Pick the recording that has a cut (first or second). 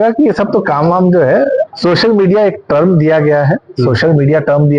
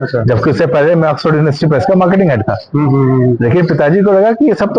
first